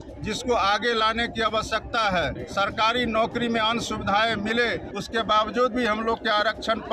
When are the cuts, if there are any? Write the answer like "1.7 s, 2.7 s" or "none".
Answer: 2.4 s, 4.9 s